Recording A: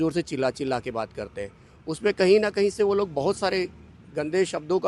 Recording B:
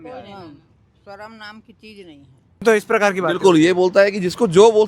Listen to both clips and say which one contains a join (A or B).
B